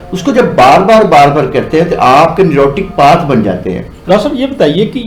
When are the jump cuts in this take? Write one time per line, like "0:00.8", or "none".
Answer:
0:04.0